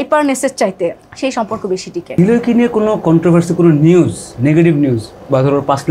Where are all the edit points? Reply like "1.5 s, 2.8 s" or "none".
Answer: 1.0 s, 2.1 s